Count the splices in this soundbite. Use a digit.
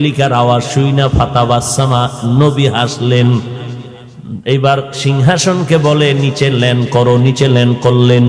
1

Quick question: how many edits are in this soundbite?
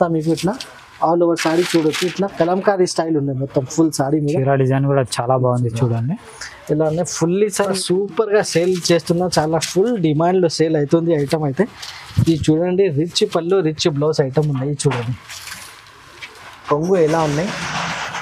1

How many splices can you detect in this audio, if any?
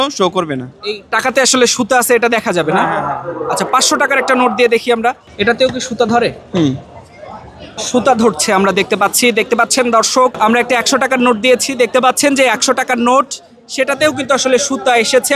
3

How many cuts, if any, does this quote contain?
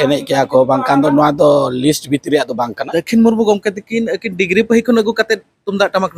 1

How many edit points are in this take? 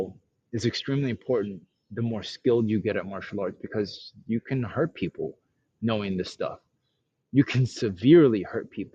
0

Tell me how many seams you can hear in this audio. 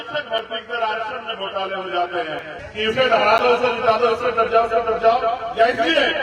1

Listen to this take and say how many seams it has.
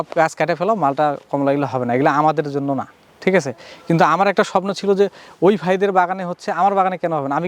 0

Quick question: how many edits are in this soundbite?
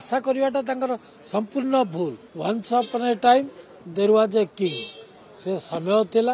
1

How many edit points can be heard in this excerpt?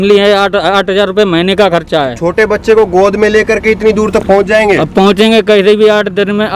0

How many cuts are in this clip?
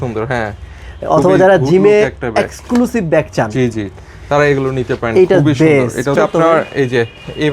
1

